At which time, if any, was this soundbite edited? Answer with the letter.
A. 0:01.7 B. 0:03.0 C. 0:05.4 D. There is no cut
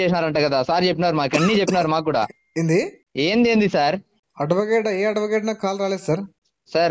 D